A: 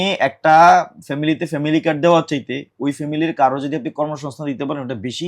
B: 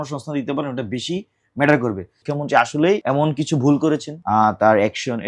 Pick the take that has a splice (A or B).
B